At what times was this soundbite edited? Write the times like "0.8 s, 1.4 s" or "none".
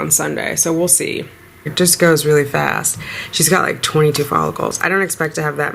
1.7 s